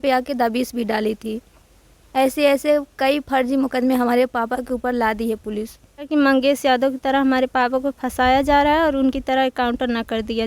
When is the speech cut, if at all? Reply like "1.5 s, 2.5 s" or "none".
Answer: 6.1 s